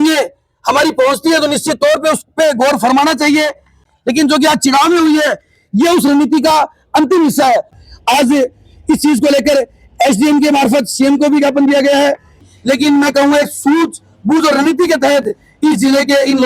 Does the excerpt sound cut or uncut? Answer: cut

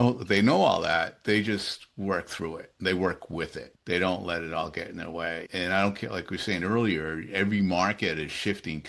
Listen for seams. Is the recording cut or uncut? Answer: cut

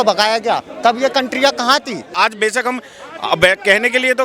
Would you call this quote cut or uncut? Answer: cut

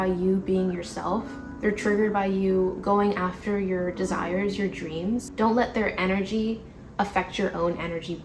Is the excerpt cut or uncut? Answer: cut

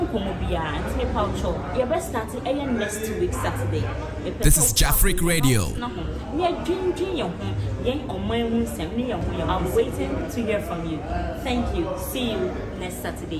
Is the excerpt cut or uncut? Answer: cut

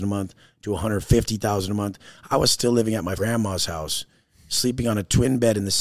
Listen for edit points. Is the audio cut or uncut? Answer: cut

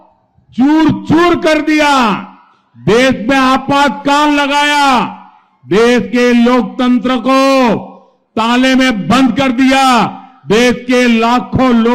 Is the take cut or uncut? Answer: uncut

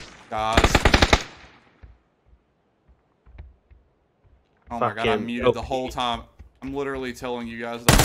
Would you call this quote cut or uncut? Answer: uncut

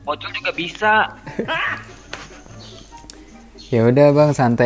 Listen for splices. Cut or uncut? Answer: uncut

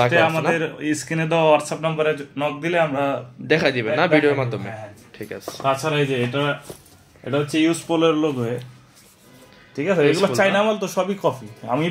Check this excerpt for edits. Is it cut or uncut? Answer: uncut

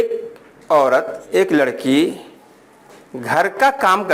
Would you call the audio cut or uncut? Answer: uncut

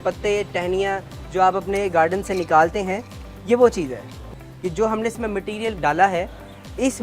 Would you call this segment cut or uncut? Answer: cut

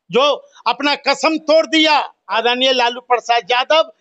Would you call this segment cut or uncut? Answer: cut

